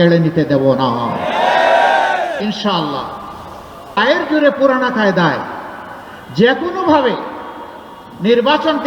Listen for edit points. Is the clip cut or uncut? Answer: cut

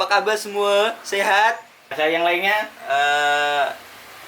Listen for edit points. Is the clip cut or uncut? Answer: cut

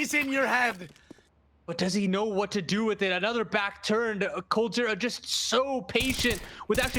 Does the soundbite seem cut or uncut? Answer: cut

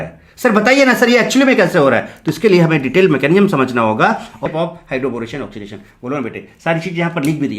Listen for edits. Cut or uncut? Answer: cut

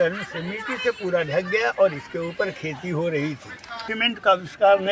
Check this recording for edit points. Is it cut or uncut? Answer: cut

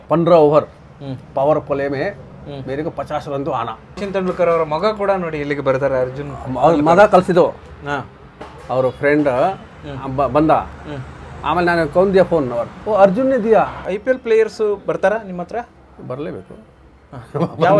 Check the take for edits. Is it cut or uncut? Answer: cut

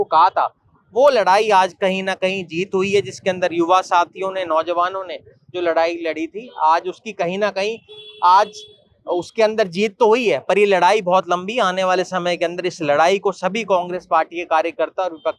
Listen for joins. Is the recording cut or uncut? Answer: uncut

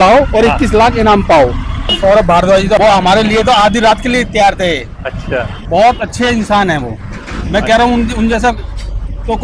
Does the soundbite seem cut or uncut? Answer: cut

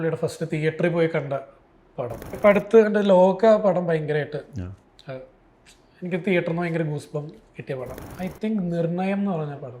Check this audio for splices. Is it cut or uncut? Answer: cut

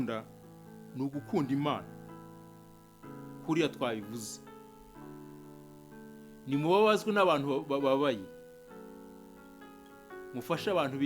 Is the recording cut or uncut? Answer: cut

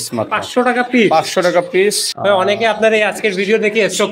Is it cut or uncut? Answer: cut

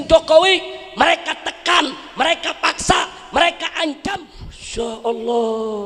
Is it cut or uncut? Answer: cut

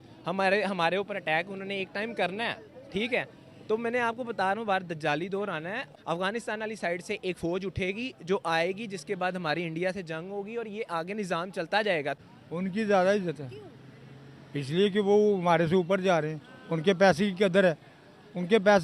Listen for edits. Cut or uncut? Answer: cut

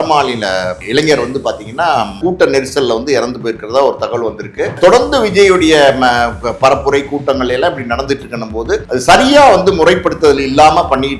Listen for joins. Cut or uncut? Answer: cut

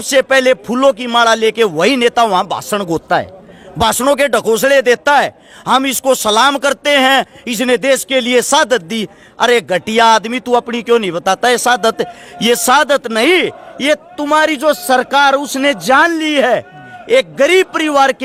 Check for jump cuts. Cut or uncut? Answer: uncut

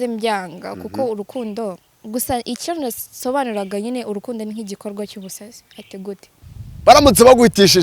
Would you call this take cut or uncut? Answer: cut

